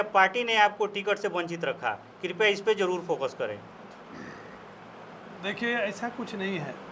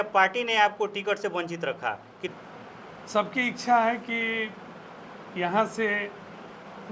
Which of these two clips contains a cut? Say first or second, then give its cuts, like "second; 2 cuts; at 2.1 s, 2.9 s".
second; 1 cut; at 2.3 s